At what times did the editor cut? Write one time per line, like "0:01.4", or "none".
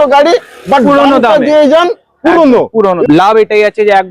0:03.0

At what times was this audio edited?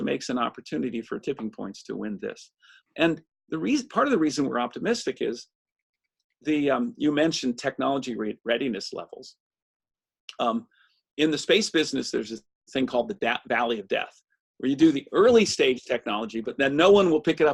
none

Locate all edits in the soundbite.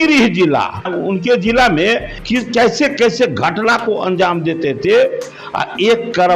0:00.9
0:02.1

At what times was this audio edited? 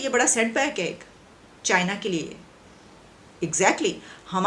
none

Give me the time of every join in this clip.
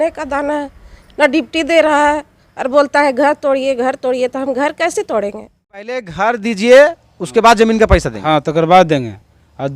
0:06.1

